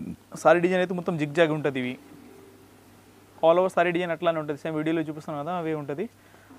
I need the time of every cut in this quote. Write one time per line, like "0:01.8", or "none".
none